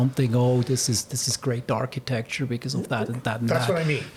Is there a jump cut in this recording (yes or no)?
no